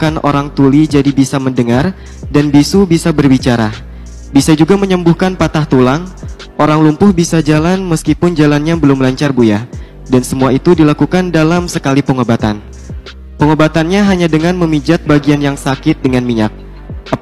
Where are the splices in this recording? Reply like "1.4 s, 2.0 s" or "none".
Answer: none